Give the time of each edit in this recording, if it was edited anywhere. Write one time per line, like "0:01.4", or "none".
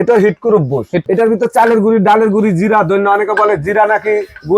0:01.0